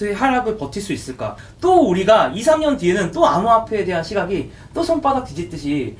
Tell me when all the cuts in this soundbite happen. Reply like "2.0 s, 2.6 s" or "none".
1.4 s

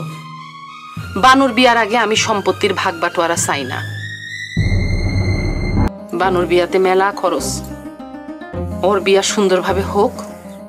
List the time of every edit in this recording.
5.9 s

